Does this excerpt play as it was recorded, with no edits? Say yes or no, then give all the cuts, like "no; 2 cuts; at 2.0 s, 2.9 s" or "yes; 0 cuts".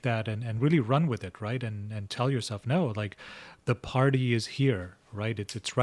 yes; 0 cuts